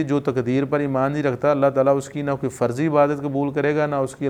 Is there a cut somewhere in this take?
no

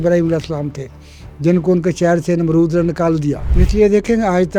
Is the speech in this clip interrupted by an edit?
yes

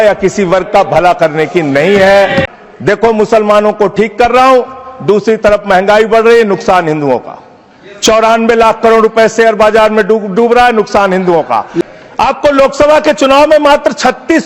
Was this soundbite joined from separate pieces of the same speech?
yes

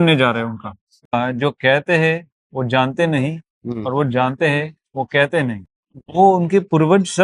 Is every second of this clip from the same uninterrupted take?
no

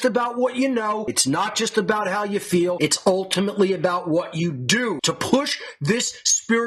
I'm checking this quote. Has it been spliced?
no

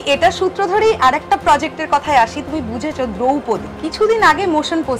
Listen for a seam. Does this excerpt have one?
no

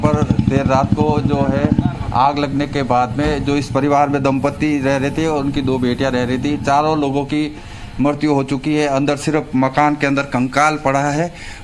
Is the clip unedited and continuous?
yes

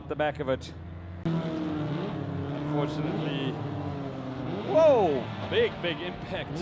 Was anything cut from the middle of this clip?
yes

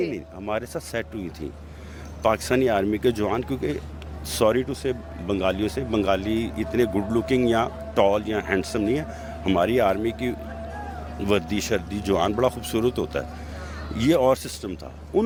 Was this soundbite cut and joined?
no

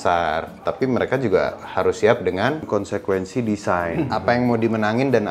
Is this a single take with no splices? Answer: no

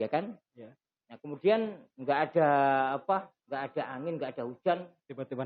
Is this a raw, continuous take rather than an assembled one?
no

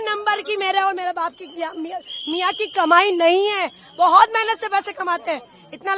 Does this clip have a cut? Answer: no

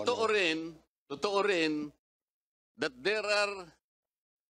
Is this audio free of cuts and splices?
yes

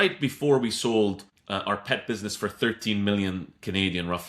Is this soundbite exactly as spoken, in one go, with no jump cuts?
no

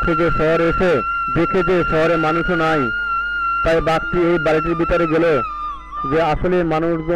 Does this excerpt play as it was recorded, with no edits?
yes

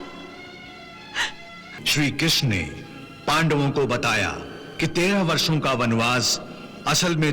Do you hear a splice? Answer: yes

